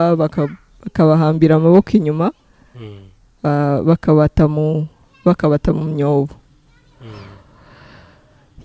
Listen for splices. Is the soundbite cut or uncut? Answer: uncut